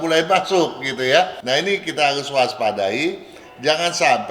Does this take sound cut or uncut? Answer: cut